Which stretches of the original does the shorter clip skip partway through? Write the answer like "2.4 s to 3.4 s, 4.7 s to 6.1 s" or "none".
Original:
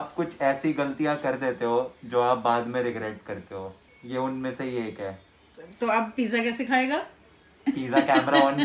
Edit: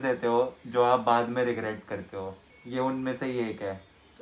none